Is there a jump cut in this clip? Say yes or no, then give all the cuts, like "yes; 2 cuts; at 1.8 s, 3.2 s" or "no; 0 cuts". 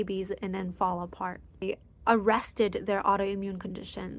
yes; 1 cut; at 1.6 s